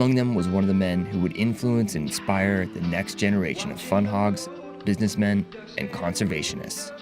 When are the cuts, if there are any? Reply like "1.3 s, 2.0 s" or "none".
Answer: none